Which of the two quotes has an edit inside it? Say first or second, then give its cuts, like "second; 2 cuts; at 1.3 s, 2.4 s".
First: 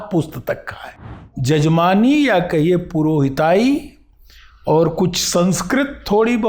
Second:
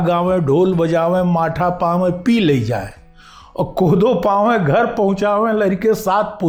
first; 1 cut; at 1.3 s